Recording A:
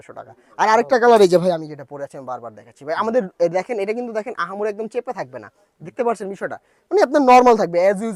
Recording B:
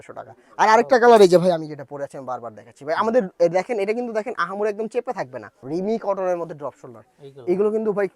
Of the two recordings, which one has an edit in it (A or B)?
B